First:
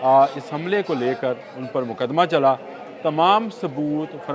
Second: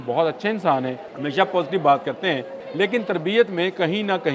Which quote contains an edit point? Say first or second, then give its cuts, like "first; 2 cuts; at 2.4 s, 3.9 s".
second; 2 cuts; at 1.1 s, 2.6 s